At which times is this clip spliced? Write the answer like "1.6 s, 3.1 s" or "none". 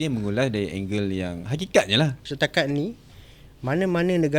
2.2 s